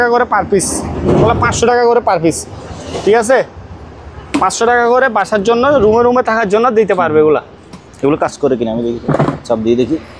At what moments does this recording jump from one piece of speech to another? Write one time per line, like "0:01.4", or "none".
none